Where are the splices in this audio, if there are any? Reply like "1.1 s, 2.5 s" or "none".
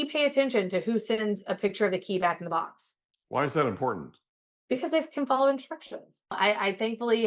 6.4 s